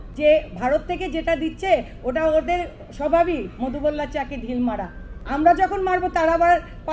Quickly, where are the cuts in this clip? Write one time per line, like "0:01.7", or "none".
none

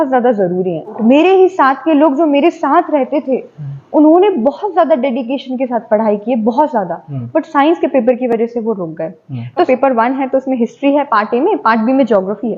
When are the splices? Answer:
0:01.0
0:09.5

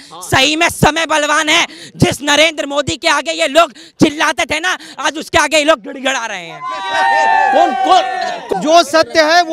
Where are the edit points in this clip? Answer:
0:08.4

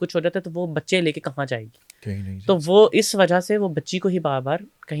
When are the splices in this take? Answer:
none

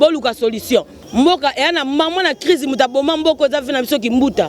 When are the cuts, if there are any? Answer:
0:01.0

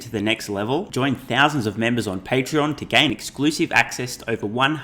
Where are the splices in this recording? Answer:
none

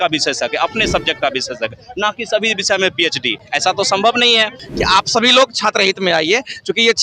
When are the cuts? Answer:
0:04.6

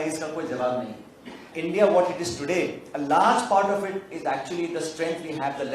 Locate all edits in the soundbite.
0:01.5

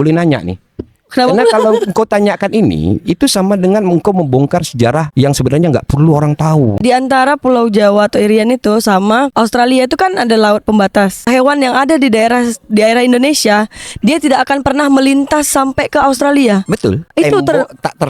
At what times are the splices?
0:06.8
0:11.3
0:17.1

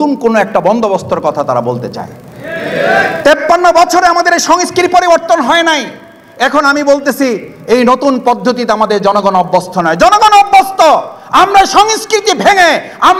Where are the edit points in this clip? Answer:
none

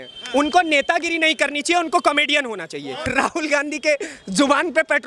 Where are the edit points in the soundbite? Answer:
0:03.0

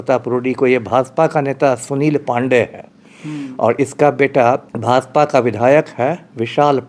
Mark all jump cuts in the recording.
0:04.7

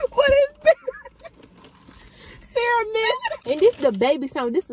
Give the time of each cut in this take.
0:03.3

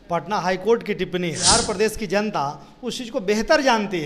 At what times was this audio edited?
0:01.4

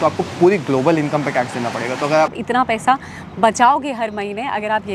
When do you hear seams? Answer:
0:02.3

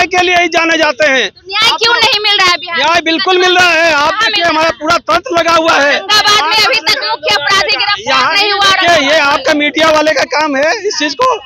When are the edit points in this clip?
none

